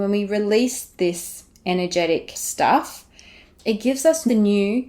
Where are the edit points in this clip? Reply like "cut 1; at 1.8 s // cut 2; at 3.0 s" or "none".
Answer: cut 1; at 2.4 s